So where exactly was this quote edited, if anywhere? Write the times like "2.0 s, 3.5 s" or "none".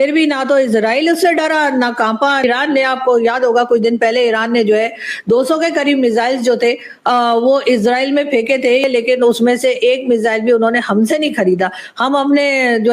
2.4 s, 8.8 s

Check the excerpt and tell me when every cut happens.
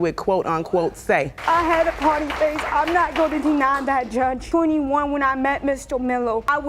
1.3 s

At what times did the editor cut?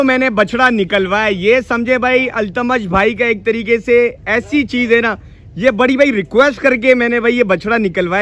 none

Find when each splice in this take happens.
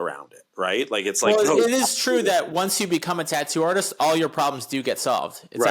none

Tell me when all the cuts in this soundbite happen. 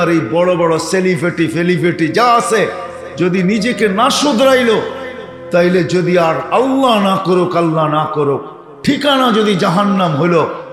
none

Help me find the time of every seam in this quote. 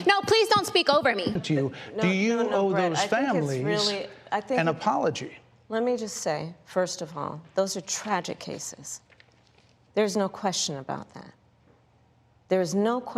1.4 s

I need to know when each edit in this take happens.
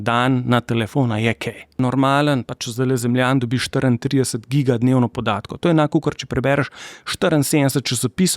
1.8 s

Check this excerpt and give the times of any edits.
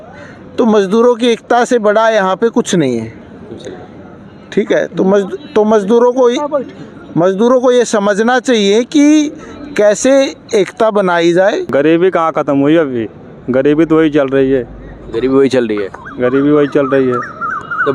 11.7 s

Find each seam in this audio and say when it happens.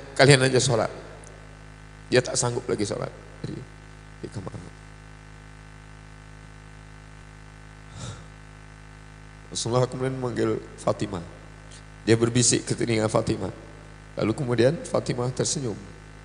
7.2 s

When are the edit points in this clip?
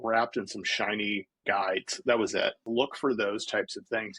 1.3 s, 2.6 s

